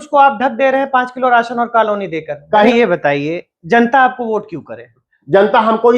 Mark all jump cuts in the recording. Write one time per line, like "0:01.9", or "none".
0:02.7